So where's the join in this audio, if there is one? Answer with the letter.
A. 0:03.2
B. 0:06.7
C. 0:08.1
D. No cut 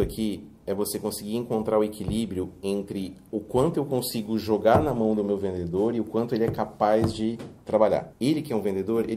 C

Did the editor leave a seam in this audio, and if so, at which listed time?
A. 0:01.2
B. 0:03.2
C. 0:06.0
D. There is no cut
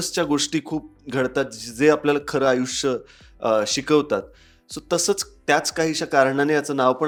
D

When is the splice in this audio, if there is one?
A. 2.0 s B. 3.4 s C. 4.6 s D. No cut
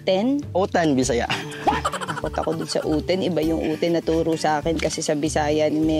A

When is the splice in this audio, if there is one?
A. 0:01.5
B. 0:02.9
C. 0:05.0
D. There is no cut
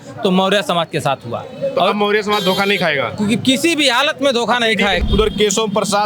C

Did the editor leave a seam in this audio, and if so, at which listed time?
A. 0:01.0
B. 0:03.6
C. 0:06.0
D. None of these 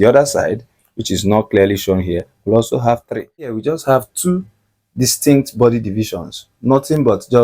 B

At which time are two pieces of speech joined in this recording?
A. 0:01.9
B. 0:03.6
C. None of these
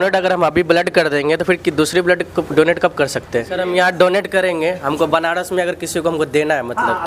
B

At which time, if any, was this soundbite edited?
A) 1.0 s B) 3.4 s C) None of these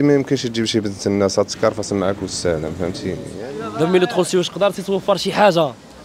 B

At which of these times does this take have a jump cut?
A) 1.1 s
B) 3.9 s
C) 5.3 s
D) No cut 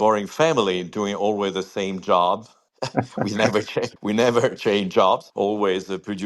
B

